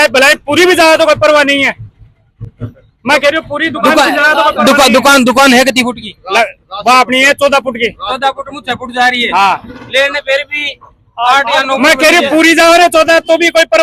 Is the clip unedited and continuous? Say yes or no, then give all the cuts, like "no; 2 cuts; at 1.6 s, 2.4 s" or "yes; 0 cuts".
yes; 0 cuts